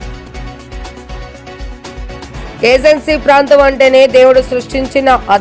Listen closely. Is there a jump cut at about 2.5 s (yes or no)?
yes